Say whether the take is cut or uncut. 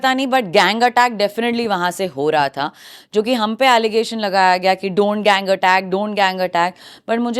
uncut